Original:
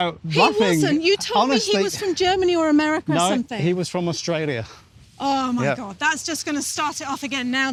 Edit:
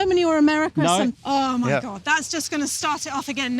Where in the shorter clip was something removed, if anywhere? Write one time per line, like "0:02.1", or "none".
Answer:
0:01.2